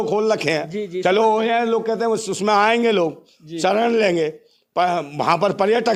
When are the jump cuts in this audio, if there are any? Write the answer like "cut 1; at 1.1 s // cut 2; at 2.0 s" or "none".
none

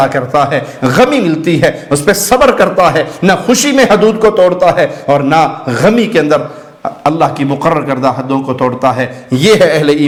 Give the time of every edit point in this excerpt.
none

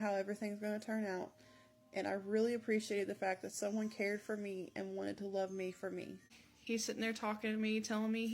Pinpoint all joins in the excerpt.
cut 1; at 6.5 s

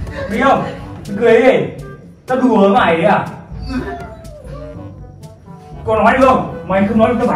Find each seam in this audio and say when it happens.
none

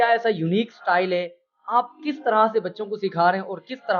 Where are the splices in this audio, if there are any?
none

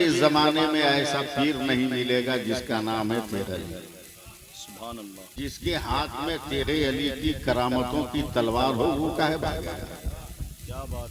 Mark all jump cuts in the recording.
cut 1; at 5.2 s

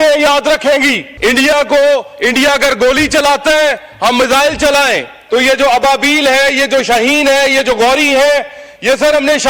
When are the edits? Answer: cut 1; at 1.1 s // cut 2; at 5.1 s

